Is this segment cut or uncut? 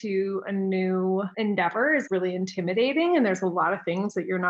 cut